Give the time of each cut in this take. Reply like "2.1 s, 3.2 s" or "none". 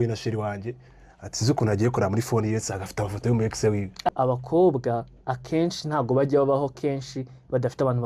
4.1 s